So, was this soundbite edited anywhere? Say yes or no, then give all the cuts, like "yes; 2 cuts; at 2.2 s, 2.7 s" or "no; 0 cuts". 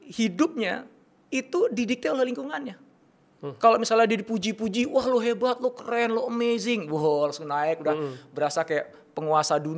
no; 0 cuts